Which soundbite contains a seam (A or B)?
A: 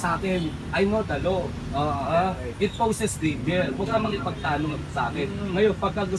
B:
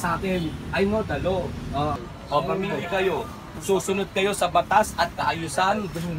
B